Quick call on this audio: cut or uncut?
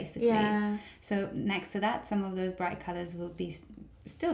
uncut